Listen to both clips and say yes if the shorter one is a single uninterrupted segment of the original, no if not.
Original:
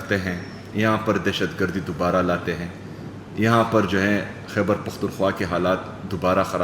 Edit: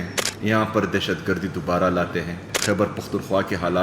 no